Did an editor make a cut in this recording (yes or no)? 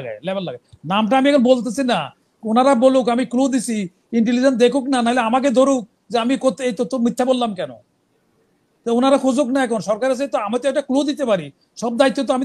no